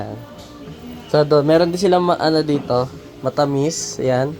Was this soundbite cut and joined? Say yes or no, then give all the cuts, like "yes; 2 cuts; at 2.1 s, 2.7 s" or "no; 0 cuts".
no; 0 cuts